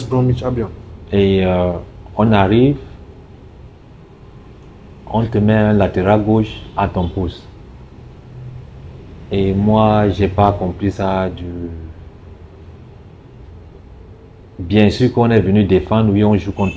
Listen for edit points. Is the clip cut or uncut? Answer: uncut